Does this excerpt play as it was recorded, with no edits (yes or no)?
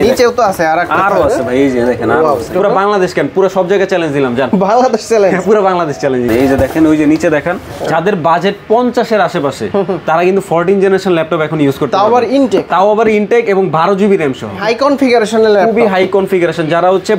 no